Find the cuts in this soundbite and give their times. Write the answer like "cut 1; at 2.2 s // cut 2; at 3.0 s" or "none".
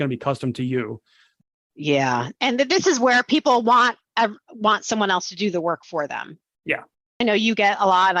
cut 1; at 7.2 s